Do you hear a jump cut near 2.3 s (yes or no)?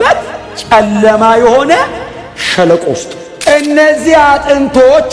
no